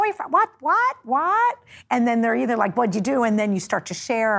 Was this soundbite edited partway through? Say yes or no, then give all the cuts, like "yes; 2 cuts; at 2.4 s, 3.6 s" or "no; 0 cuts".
yes; 1 cut; at 1.7 s